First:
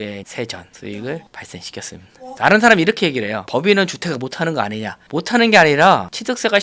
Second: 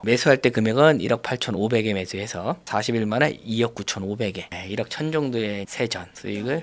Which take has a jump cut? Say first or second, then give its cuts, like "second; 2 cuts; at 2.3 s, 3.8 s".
first; 1 cut; at 2.2 s